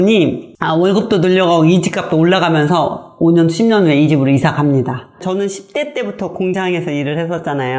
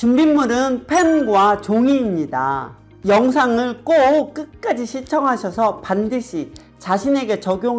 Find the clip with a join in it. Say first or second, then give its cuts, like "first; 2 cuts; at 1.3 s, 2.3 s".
first; 1 cut; at 5.2 s